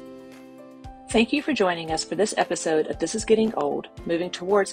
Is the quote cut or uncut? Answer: cut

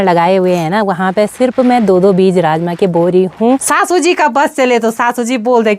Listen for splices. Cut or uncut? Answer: cut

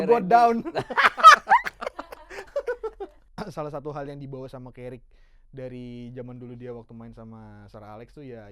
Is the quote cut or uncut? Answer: cut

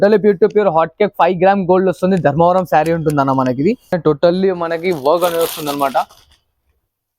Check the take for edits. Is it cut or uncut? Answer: cut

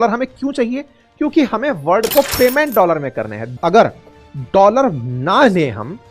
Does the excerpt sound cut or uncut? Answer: cut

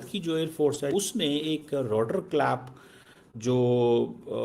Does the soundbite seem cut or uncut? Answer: cut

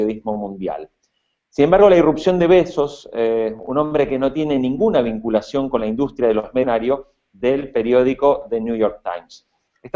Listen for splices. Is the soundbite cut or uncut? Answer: uncut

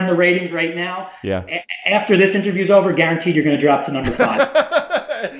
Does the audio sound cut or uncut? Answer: cut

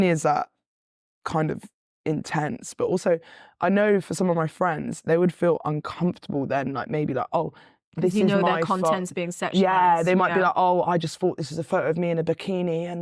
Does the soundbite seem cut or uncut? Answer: uncut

